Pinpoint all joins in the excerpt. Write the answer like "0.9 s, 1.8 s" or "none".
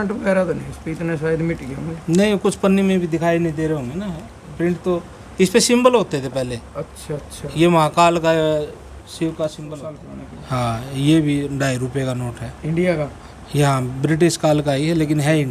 10.1 s

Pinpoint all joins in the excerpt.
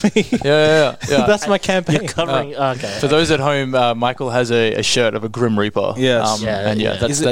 none

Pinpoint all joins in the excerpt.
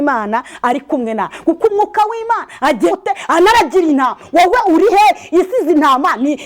2.9 s

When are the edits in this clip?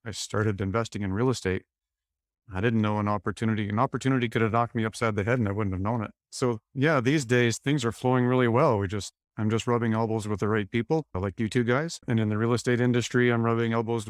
7.6 s

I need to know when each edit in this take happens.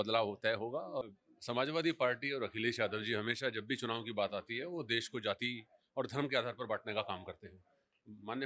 1.0 s

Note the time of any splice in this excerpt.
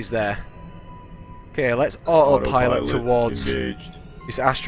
2.5 s

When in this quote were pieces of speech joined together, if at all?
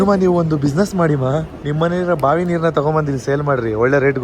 1.6 s

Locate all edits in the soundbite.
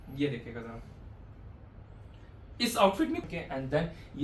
3.2 s

